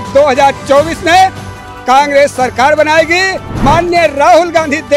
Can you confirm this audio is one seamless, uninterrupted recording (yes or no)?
no